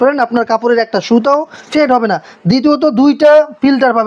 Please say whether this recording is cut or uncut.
uncut